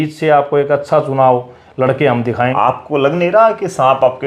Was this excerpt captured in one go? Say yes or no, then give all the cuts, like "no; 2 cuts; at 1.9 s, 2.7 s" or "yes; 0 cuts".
no; 1 cut; at 2.5 s